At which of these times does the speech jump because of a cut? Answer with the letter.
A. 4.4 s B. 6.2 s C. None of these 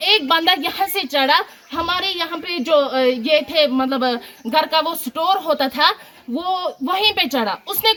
C